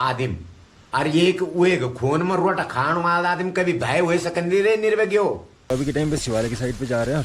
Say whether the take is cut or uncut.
cut